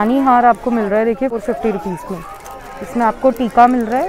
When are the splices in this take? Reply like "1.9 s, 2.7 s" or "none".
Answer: 1.4 s